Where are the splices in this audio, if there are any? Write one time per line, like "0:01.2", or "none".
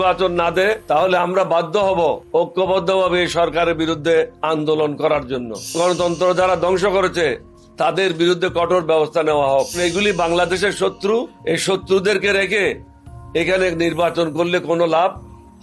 0:00.8
0:02.2
0:04.4
0:05.7
0:09.8
0:11.3